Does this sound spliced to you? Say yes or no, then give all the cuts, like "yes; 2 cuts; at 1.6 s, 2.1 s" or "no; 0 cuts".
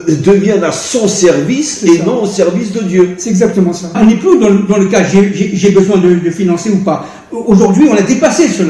yes; 1 cut; at 4.0 s